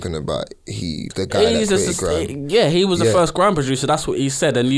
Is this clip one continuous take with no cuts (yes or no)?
no